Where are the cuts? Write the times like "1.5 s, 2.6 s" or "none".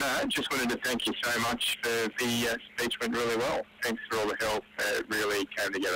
2.1 s, 3.8 s